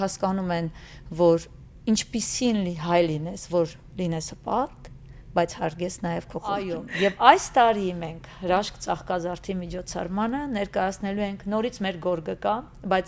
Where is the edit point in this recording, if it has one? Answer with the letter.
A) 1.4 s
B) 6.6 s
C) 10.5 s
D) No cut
B